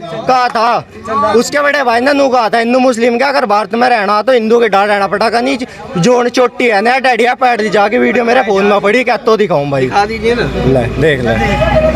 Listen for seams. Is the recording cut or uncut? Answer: uncut